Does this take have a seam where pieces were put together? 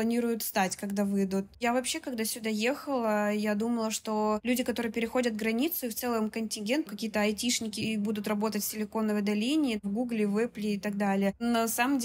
yes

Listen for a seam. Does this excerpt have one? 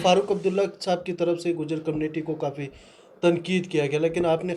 no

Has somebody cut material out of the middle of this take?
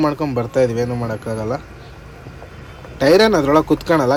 no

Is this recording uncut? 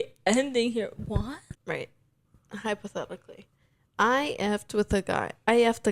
no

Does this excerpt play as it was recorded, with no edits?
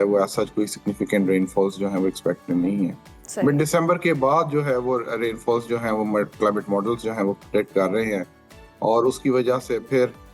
yes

